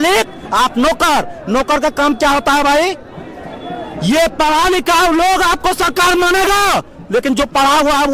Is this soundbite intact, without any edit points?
yes; 0 cuts

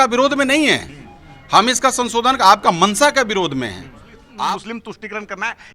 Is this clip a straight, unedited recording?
no; 1 cut; at 4.6 s

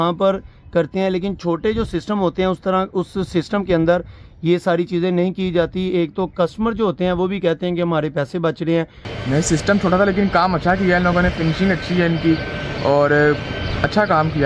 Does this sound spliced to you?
yes; 1 cut; at 9.0 s

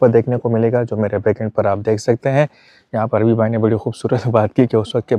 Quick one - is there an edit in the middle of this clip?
no; 0 cuts

